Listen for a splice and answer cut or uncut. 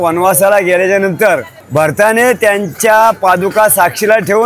cut